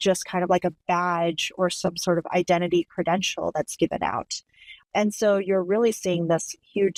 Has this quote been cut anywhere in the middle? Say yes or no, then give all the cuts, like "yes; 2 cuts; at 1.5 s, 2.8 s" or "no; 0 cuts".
no; 0 cuts